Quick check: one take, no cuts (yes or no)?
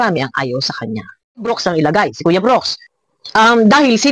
no